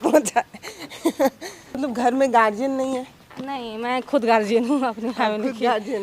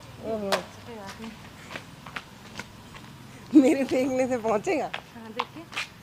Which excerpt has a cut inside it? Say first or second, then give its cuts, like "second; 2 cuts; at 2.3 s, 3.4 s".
first; 1 cut; at 1.8 s